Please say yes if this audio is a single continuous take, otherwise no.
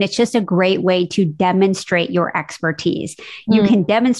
yes